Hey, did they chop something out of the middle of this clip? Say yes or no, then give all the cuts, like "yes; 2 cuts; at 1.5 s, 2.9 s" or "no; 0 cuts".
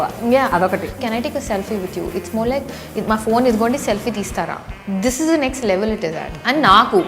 yes; 1 cut; at 1.0 s